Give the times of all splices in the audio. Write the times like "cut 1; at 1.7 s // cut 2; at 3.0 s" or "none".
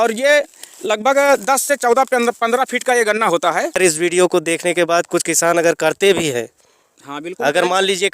cut 1; at 3.8 s